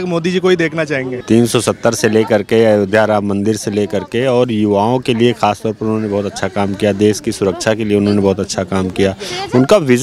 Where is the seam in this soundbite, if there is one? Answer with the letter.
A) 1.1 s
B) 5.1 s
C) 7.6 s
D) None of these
A